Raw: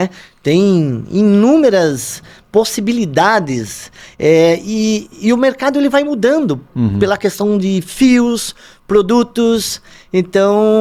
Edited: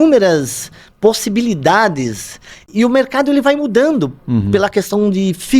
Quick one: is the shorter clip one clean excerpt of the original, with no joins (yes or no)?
no